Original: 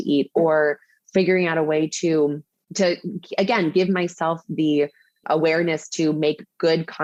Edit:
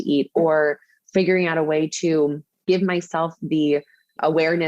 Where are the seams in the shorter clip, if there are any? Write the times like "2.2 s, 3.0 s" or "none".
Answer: 2.6 s